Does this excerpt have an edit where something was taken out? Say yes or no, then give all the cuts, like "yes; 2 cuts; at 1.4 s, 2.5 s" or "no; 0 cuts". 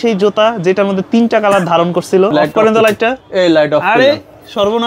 yes; 1 cut; at 2.3 s